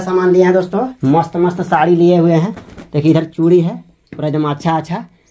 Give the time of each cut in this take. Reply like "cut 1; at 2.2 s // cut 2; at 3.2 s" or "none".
cut 1; at 0.9 s